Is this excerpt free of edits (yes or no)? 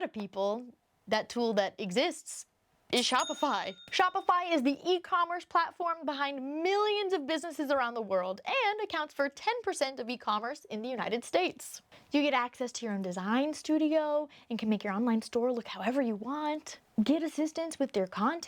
no